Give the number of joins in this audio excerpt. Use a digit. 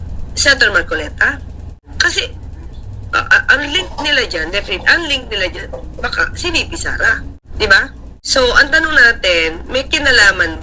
3